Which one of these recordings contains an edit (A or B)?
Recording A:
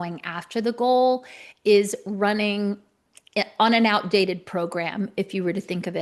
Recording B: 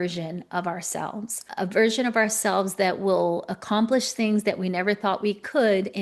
B